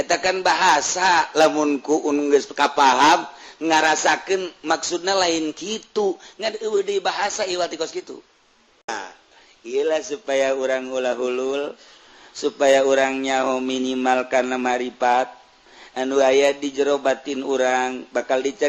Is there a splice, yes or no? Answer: yes